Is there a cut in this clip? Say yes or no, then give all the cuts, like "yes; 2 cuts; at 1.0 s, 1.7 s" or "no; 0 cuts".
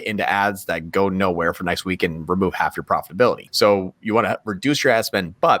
yes; 1 cut; at 3.5 s